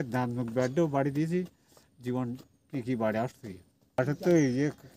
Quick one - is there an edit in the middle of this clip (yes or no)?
yes